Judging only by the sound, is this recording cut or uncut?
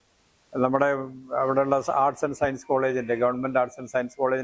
uncut